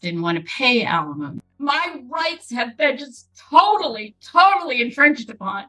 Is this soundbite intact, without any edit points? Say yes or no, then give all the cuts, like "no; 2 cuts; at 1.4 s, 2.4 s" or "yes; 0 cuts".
no; 1 cut; at 1.4 s